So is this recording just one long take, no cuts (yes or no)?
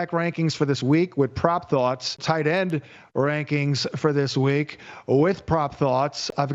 no